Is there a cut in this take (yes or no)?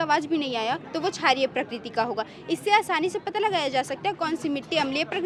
no